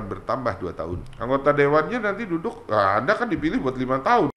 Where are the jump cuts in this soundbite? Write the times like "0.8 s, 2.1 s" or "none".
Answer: 1.1 s